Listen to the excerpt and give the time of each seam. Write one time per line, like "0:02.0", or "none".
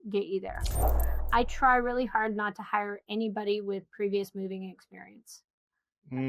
0:00.9